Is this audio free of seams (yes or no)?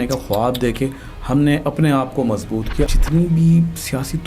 no